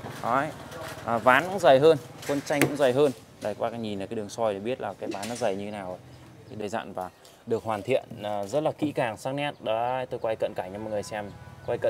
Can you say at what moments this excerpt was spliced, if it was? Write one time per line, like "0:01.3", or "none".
0:06.6